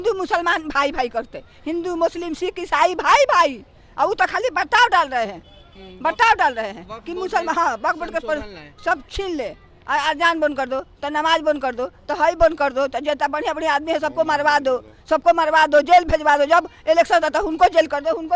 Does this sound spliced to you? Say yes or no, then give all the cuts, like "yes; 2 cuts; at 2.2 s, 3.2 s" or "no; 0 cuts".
no; 0 cuts